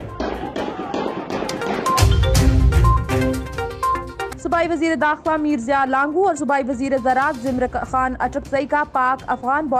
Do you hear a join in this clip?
yes; 2 cuts; at 1.8 s, 4.3 s

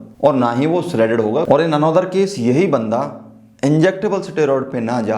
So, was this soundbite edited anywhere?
yes; 1 cut; at 1.4 s

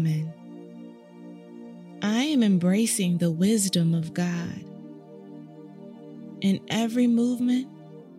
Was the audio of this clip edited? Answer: yes; 2 cuts; at 4.6 s, 6.4 s

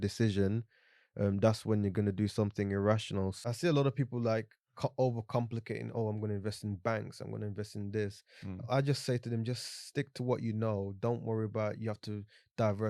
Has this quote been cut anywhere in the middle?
yes; 1 cut; at 3.4 s

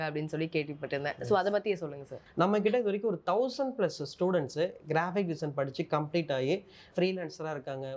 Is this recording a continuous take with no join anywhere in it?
no; 1 cut; at 2.2 s

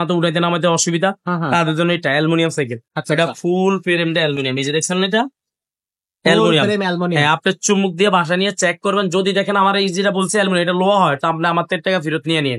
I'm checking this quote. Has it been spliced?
no; 0 cuts

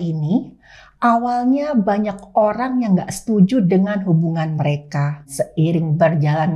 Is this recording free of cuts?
no; 1 cut; at 5.3 s

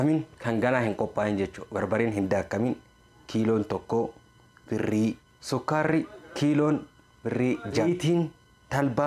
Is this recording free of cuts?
no; 2 cuts; at 5.3 s, 7.8 s

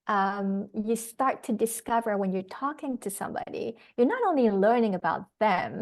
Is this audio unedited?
yes; 0 cuts

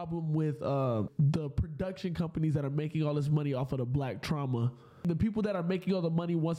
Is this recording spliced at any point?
yes; 2 cuts; at 1.1 s, 5.0 s

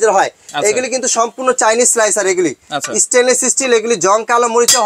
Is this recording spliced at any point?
no; 0 cuts

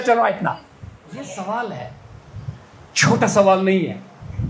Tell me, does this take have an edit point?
yes; 1 cut; at 1.3 s

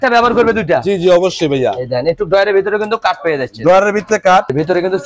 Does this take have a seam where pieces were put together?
no; 0 cuts

